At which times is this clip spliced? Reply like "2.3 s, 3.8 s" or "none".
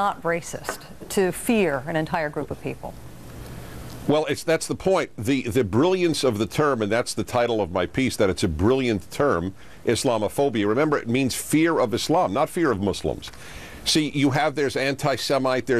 none